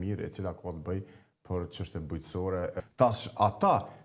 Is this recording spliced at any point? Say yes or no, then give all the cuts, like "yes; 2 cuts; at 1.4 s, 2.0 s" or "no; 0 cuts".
yes; 1 cut; at 2.8 s